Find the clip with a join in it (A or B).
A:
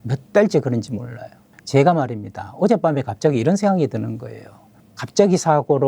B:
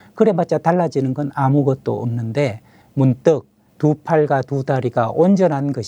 A